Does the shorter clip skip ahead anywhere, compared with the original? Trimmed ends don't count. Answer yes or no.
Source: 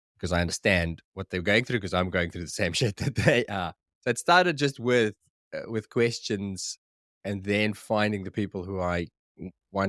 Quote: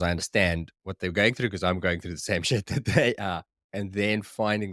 yes